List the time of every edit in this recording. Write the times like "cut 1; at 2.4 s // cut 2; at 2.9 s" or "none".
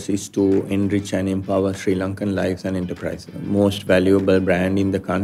cut 1; at 3.4 s